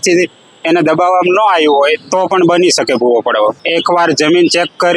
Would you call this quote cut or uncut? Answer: cut